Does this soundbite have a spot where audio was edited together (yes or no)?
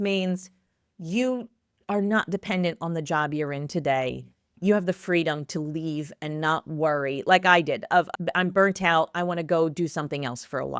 no